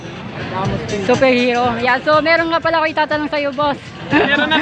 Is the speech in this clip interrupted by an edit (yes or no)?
no